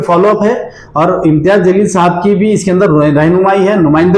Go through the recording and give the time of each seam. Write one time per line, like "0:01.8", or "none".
none